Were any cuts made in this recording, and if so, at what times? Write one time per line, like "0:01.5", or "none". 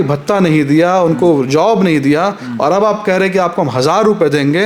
none